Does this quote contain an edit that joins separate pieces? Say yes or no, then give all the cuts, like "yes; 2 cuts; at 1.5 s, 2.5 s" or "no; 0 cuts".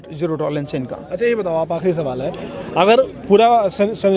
no; 0 cuts